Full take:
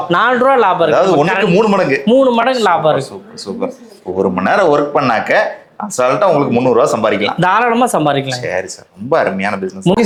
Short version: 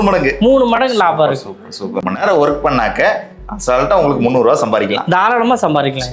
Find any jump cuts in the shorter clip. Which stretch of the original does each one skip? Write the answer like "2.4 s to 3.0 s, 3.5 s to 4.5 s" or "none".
3.8 s to 4.4 s